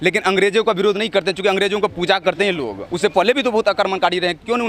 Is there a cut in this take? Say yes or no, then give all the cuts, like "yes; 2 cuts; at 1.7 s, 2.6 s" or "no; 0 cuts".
yes; 1 cut; at 2.9 s